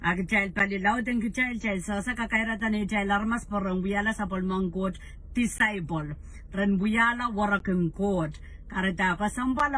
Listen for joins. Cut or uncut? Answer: uncut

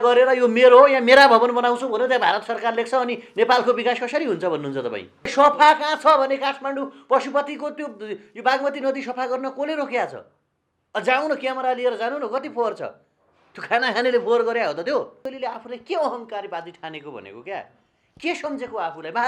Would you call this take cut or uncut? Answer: cut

